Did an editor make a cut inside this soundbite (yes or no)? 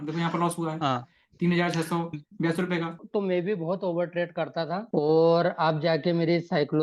yes